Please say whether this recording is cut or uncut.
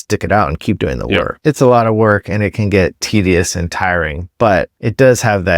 cut